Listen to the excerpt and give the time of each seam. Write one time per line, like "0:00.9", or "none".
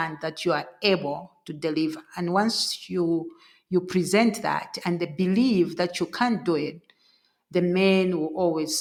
none